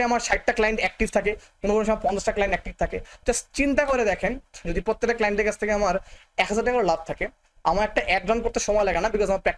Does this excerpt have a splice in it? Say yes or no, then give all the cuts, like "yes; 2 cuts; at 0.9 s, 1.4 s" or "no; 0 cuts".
no; 0 cuts